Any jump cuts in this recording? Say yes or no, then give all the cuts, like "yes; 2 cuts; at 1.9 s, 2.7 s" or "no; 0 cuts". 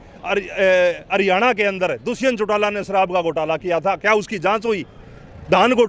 no; 0 cuts